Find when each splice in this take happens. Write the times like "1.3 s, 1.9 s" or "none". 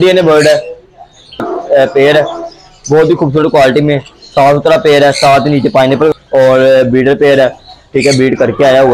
1.4 s, 6.2 s